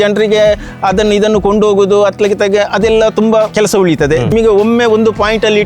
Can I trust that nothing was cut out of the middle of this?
no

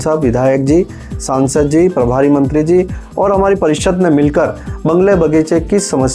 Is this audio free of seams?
yes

